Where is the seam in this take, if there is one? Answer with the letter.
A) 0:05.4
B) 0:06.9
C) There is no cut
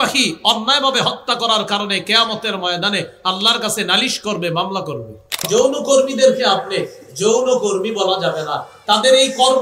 A